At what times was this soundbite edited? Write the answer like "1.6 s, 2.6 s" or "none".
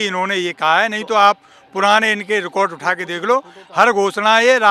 none